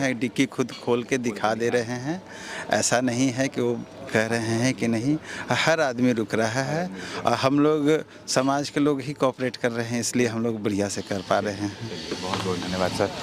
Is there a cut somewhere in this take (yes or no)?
no